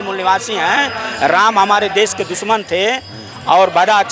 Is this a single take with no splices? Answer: yes; 0 cuts

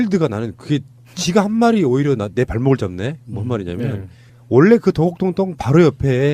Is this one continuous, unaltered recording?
no; 1 cut; at 4.1 s

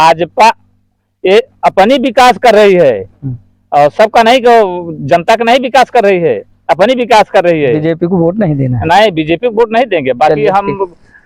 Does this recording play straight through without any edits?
yes; 0 cuts

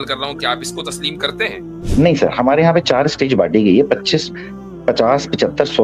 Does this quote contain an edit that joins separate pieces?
yes; 1 cut; at 1.7 s

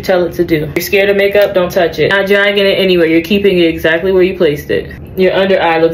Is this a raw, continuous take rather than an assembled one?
no; 3 cuts; at 0.8 s, 2.1 s, 5.0 s

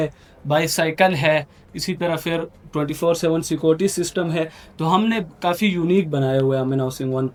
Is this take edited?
no; 0 cuts

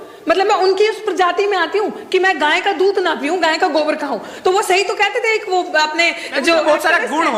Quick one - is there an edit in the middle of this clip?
no; 0 cuts

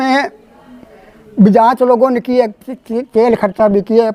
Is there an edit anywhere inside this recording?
no; 0 cuts

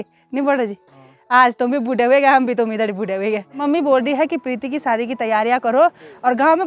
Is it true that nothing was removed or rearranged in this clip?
no; 1 cut; at 3.6 s

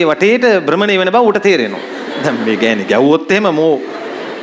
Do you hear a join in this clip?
yes; 1 cut; at 2.1 s

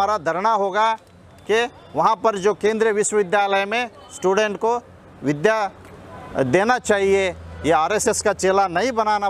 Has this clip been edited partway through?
no; 0 cuts

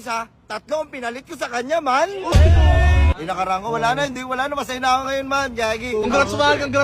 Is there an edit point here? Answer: yes; 2 cuts; at 3.1 s, 6.0 s

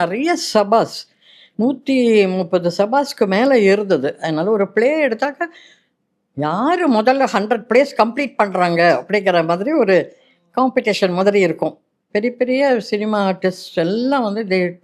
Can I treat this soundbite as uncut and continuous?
yes; 0 cuts

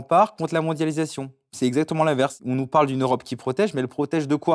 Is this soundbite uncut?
no; 1 cut; at 2.4 s

